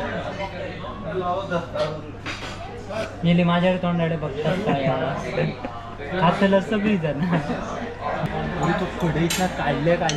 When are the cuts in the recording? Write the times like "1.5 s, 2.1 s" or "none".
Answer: 8.2 s